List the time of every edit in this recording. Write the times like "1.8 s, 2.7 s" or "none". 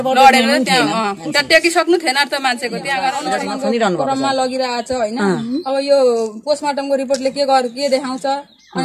3.2 s